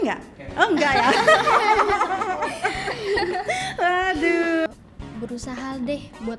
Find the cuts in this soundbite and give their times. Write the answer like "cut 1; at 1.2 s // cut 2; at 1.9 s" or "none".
cut 1; at 4.8 s